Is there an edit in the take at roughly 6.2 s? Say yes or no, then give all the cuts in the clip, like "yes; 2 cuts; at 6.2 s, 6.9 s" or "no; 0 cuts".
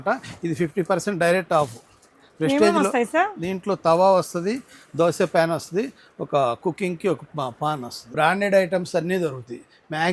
no; 1 cut; at 8.0 s